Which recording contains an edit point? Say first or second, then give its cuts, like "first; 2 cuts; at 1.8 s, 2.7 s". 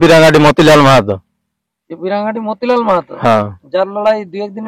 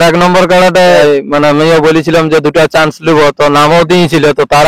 second; 1 cut; at 1.0 s